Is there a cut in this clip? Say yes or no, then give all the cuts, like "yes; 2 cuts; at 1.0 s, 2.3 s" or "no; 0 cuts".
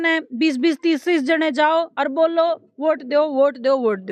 no; 0 cuts